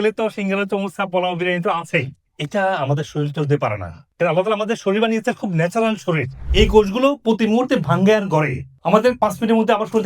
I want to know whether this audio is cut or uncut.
cut